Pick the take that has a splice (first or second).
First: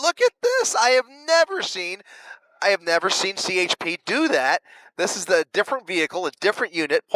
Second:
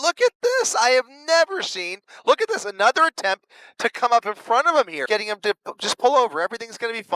second